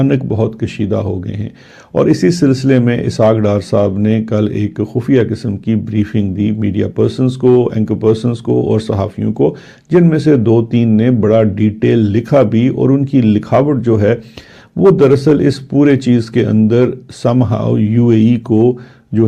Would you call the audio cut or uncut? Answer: uncut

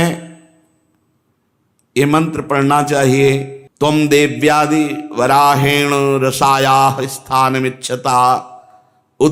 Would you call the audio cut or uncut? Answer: cut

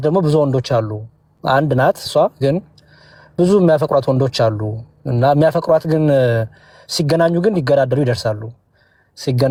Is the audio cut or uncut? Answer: uncut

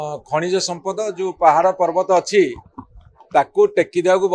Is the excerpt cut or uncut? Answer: uncut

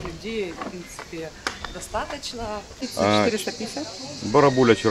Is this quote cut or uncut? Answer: cut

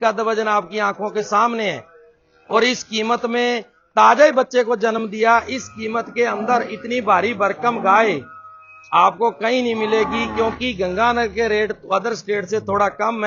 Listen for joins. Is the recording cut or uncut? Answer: uncut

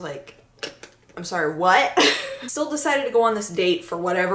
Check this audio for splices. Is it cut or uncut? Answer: cut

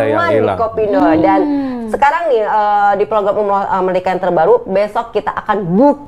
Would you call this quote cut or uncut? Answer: cut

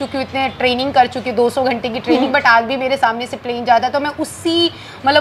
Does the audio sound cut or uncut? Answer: uncut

